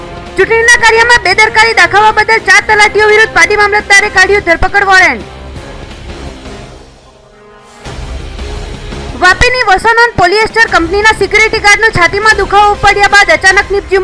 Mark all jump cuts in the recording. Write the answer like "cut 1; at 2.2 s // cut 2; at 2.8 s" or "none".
none